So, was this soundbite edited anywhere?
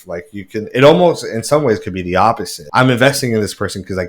yes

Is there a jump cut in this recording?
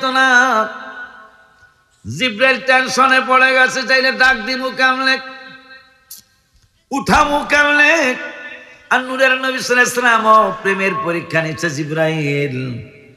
no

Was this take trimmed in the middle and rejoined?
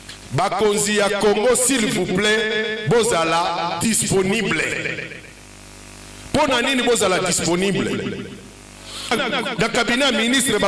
yes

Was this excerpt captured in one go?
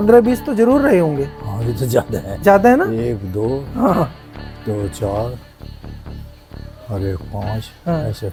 yes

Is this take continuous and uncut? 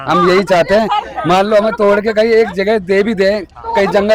yes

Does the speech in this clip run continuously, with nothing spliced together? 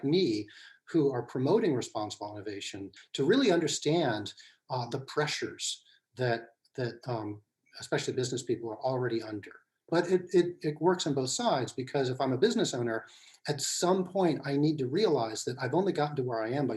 no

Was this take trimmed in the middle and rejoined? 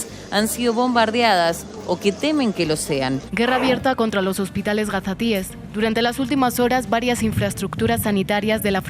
yes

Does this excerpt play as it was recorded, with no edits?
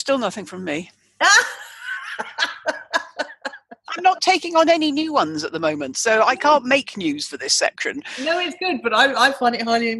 yes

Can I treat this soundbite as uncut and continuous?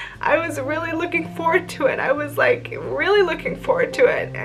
yes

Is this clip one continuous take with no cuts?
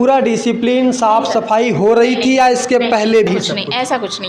yes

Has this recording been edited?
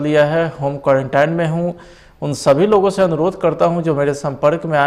no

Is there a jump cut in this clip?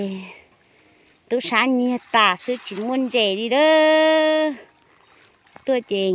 no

